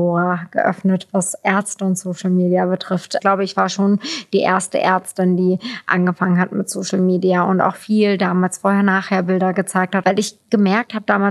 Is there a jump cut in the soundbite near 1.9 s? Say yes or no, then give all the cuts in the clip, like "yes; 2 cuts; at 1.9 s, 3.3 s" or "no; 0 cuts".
no; 2 cuts; at 3.2 s, 10.0 s